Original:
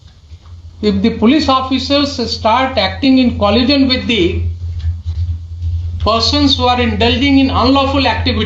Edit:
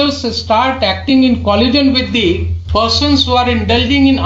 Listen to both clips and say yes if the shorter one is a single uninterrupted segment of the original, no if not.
no